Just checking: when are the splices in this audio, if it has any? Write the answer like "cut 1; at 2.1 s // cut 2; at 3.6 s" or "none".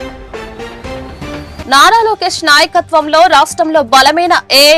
none